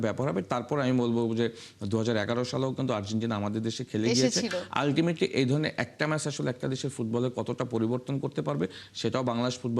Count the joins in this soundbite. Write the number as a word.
zero